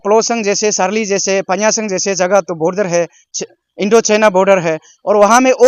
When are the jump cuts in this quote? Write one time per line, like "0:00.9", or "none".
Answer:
none